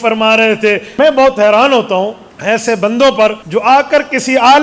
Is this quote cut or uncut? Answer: cut